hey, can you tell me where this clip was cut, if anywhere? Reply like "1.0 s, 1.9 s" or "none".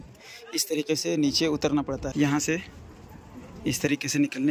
2.1 s